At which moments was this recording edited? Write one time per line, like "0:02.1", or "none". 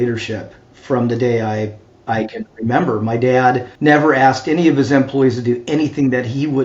0:03.7